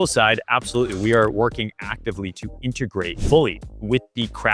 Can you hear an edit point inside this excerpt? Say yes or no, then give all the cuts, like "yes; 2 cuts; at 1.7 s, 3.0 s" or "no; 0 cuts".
yes; 2 cuts; at 1.3 s, 3.2 s